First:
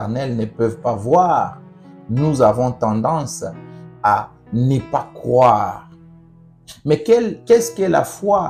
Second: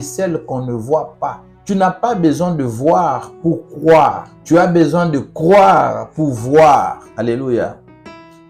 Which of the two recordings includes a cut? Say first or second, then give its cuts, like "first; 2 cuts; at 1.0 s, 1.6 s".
second; 3 cuts; at 1.5 s, 4.3 s, 7.0 s